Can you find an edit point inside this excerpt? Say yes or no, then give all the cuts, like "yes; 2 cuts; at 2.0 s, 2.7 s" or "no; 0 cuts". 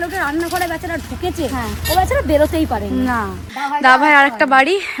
no; 0 cuts